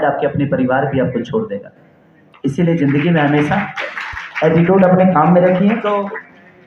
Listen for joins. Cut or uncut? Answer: uncut